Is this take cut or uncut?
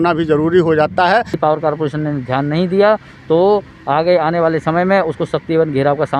cut